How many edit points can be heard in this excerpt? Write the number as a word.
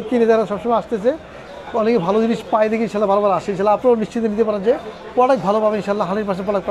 zero